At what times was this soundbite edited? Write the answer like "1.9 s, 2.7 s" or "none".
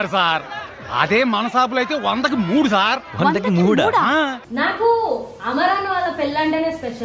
4.3 s